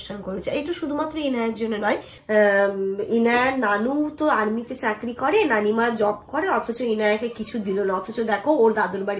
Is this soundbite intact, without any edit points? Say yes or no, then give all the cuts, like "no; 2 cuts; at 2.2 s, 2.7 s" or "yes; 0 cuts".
no; 1 cut; at 2.1 s